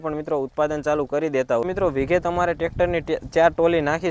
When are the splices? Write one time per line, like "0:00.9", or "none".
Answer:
0:01.6